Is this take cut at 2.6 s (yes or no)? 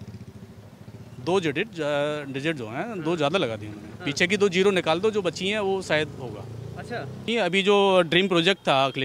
no